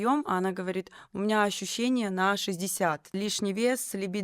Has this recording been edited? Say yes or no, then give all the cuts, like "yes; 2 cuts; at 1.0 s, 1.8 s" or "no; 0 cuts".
yes; 1 cut; at 3.2 s